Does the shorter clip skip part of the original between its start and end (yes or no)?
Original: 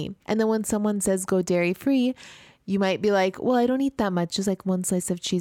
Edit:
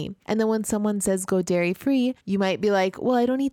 yes